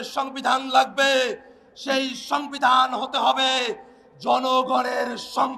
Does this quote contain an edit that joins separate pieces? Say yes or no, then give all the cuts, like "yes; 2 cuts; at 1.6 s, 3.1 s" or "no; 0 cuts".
no; 0 cuts